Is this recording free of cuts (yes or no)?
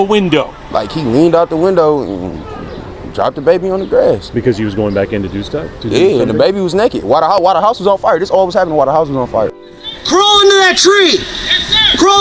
no